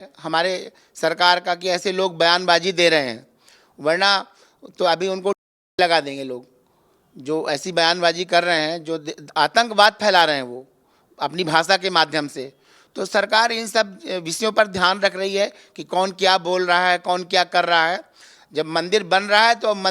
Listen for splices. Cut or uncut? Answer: uncut